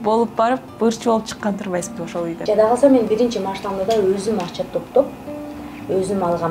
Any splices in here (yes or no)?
yes